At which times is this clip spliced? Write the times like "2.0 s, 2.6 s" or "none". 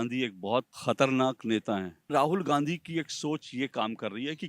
2.1 s